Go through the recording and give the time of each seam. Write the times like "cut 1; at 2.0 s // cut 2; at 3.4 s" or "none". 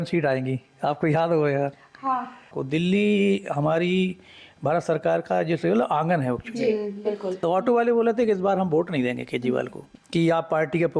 cut 1; at 2.6 s // cut 2; at 7.4 s // cut 3; at 9.8 s